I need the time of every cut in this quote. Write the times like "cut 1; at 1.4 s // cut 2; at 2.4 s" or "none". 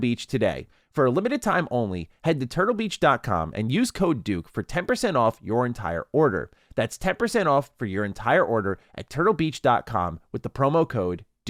none